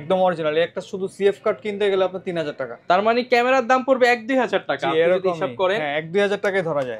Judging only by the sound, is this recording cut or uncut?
uncut